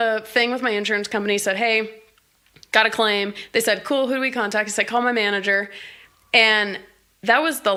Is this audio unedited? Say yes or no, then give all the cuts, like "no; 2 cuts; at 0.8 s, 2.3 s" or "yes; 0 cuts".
yes; 0 cuts